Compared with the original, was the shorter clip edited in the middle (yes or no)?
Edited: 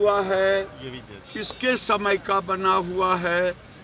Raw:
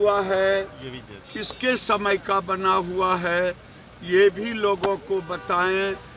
no